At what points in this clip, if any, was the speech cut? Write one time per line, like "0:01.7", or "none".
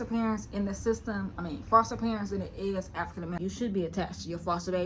0:03.4

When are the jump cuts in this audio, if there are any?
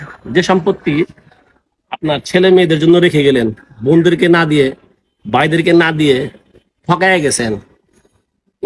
none

